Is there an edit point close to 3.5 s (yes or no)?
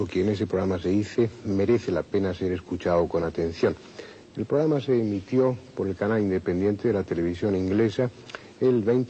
no